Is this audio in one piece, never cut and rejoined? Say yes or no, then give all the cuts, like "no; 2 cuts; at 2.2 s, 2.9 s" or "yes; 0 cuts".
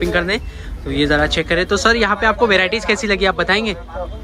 yes; 0 cuts